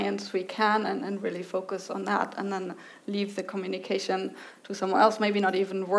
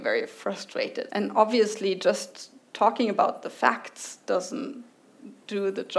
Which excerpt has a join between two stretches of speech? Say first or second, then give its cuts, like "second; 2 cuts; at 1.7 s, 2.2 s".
second; 1 cut; at 1.1 s